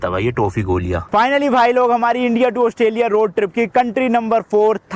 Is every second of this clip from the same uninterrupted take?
no; 1 cut; at 1.1 s

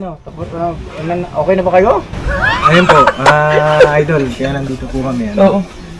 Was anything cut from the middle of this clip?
no; 0 cuts

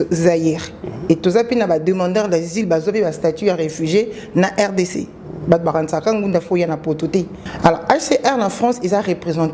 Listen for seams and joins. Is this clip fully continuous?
no; 1 cut; at 7.4 s

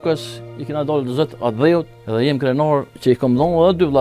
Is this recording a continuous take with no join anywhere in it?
no; 2 cuts; at 2.0 s, 3.0 s

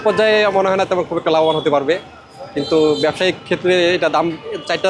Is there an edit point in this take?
no; 0 cuts

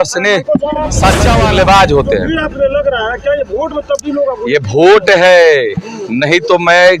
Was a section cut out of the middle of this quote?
yes; 1 cut; at 1.3 s

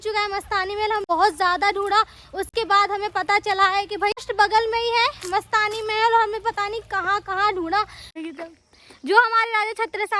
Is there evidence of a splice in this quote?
yes; 3 cuts; at 1.0 s, 4.3 s, 8.1 s

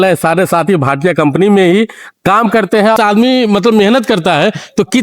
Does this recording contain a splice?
yes; 1 cut; at 3.0 s

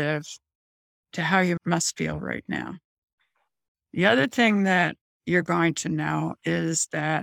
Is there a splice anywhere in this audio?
yes; 1 cut; at 1.6 s

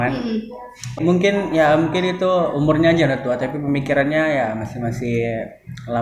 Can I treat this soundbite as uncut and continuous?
no; 1 cut; at 1.0 s

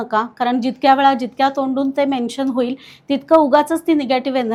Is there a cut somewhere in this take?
no; 0 cuts

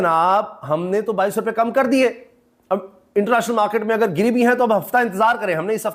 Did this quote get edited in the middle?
no; 0 cuts

